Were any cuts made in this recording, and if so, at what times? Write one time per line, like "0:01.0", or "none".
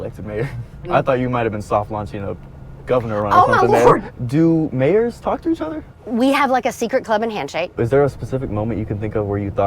0:00.8
0:04.1
0:06.0
0:07.7